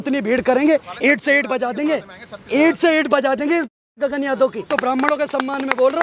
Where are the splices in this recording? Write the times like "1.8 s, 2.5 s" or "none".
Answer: 4.6 s